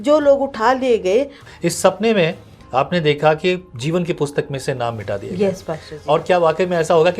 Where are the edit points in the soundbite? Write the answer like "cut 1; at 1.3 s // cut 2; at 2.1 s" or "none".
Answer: cut 1; at 1.4 s

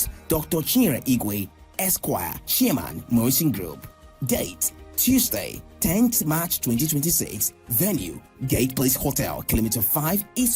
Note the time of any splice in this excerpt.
none

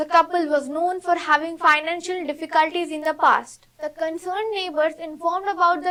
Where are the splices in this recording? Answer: none

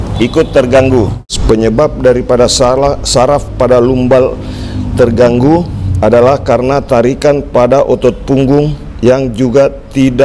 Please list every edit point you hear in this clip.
cut 1; at 1.3 s

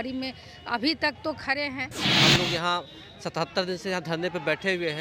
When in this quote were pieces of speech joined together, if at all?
cut 1; at 2.0 s

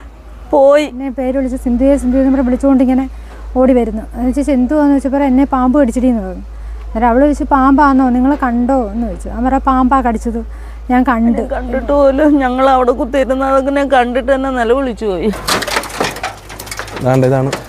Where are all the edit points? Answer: cut 1; at 15.4 s

